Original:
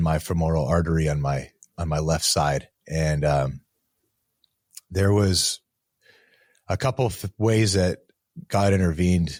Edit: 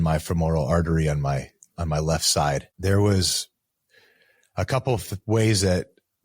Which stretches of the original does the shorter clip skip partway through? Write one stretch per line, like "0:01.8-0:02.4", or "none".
0:02.7-0:04.8